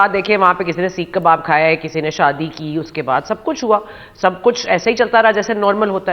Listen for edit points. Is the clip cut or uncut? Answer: uncut